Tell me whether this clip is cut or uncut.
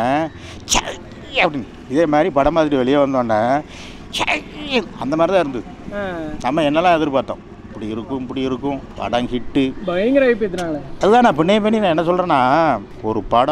uncut